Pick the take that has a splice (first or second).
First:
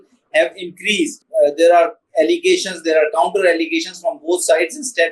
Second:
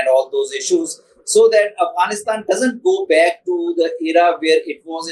first